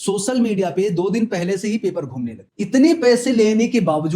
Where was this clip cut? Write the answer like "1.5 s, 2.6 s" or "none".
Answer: 2.4 s